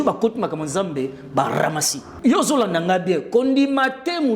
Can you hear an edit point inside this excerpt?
yes; 1 cut; at 2.1 s

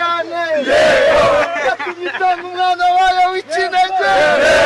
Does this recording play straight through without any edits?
yes; 0 cuts

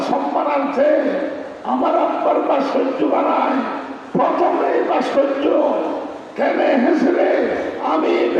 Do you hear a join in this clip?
no; 0 cuts

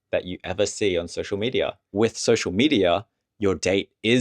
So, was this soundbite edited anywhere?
yes; 1 cut; at 1.9 s

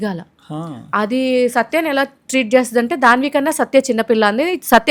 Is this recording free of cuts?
yes; 0 cuts

